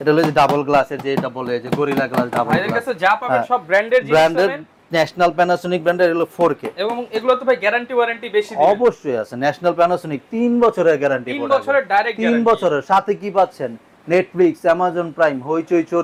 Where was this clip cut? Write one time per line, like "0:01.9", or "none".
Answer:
none